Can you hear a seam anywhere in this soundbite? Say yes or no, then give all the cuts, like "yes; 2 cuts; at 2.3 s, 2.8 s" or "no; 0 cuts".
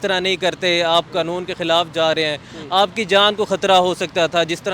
no; 0 cuts